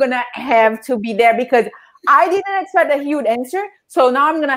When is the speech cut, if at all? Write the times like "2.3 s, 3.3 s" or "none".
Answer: none